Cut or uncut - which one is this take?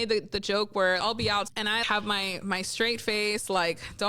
cut